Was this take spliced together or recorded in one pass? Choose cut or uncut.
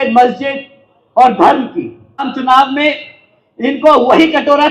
cut